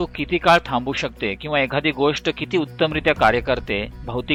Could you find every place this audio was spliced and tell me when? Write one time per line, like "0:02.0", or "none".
none